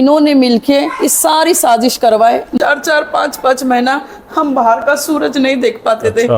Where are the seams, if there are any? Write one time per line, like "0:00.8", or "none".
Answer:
0:02.5